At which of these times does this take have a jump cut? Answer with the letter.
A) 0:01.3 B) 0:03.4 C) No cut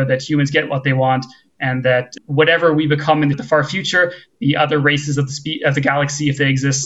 B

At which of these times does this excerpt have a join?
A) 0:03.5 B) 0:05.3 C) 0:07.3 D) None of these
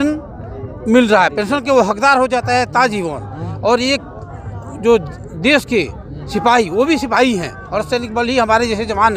D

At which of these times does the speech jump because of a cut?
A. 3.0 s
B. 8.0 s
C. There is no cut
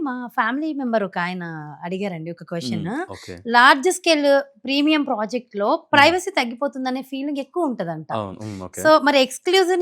C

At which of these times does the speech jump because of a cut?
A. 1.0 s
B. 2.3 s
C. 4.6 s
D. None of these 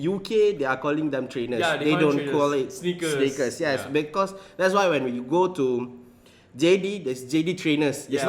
D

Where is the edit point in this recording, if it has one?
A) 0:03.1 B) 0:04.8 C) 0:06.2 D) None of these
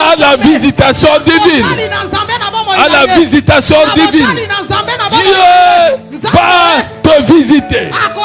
D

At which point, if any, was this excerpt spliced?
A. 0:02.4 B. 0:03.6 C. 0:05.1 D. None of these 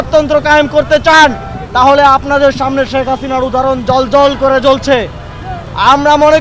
D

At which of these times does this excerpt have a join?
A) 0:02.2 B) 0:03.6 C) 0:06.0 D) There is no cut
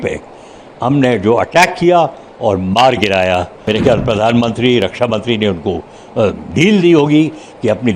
B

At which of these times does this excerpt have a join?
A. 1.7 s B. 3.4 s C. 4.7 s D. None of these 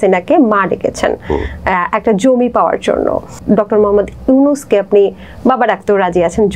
B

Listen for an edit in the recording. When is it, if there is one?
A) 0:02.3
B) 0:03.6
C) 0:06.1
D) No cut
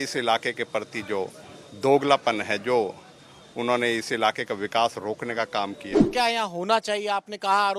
C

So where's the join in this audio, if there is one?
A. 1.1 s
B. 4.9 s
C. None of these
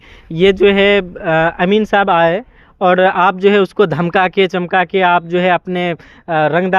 C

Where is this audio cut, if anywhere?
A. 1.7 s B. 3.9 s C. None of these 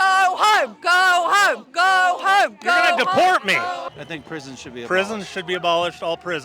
B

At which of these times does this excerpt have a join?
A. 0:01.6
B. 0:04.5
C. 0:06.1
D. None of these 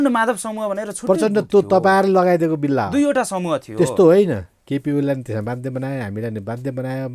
B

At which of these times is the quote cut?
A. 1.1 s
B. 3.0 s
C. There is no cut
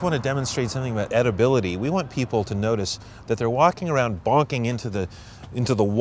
A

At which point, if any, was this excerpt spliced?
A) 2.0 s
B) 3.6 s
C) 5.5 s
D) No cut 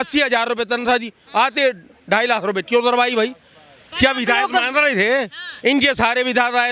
D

